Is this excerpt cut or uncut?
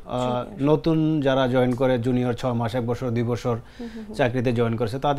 uncut